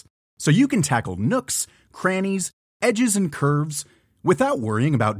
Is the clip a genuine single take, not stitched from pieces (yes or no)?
yes